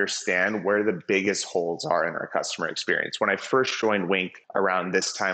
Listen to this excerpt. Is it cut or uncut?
cut